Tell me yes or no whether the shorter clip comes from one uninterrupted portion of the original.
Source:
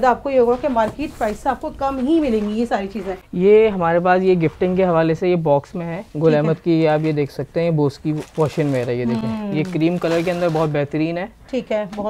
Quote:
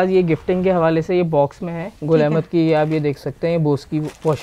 yes